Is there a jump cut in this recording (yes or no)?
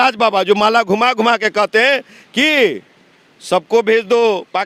no